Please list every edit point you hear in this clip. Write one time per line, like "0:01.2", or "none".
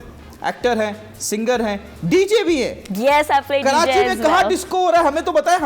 none

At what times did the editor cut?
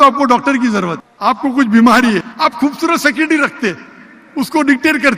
0:01.0
0:02.3

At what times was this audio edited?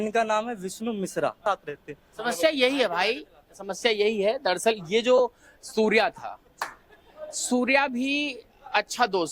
0:01.4

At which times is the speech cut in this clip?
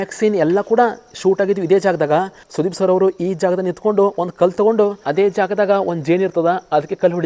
0:02.4
0:05.0

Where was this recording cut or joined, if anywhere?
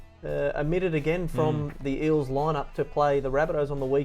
none

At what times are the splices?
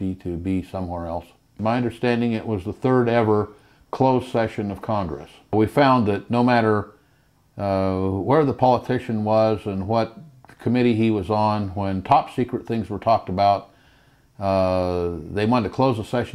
0:01.6
0:05.5

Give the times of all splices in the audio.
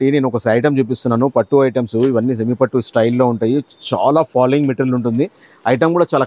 none

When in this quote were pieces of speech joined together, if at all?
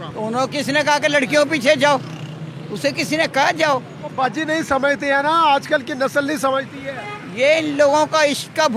none

